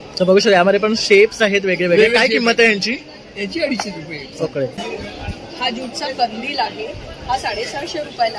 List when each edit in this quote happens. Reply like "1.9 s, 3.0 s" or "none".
4.8 s